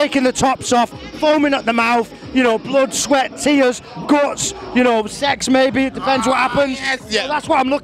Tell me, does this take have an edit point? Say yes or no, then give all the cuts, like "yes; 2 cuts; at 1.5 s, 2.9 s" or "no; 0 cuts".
no; 0 cuts